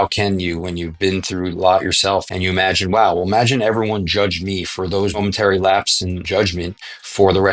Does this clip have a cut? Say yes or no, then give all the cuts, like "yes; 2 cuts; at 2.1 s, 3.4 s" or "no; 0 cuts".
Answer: yes; 3 cuts; at 2.3 s, 5.2 s, 6.2 s